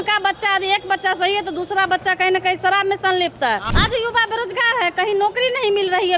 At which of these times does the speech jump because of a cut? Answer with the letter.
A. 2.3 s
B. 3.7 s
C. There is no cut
B